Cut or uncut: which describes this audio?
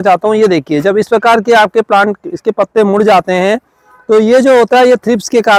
uncut